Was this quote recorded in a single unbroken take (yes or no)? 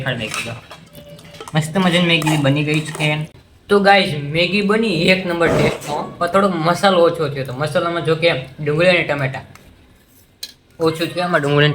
no